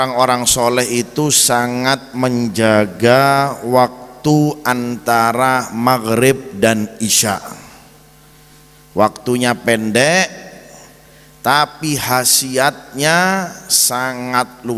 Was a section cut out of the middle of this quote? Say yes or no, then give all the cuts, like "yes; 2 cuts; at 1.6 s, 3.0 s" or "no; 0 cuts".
no; 0 cuts